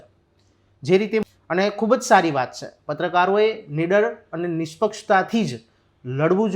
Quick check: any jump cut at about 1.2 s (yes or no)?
yes